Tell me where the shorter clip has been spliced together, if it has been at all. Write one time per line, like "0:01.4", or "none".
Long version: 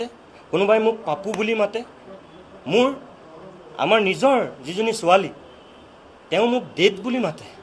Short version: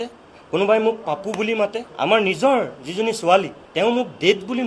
0:01.8
0:03.6

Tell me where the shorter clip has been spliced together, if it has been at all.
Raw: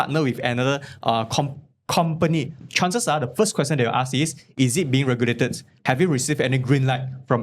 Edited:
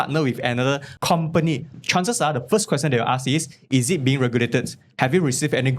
0:00.9

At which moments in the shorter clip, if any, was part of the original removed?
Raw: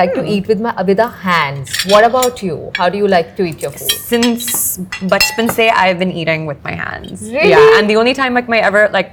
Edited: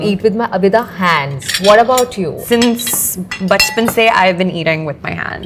0:02.4

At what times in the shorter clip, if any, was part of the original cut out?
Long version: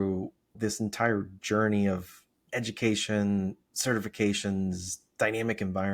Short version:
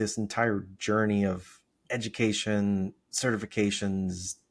none

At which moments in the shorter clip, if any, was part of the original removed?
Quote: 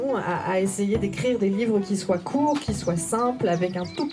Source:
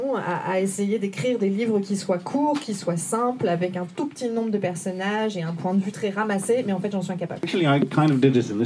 none

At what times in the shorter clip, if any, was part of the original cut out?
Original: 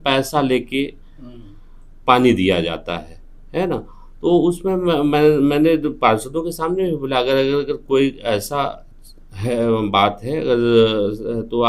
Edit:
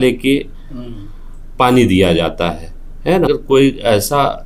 0:03.3

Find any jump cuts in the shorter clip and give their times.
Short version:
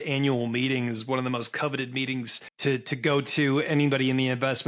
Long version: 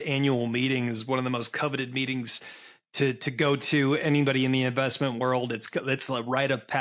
0:02.4

